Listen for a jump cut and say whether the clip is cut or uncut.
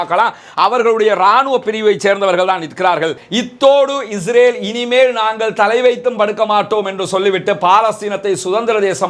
cut